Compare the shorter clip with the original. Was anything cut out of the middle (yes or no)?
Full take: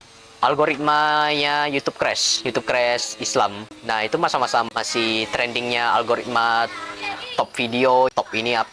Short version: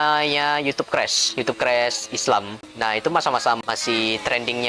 no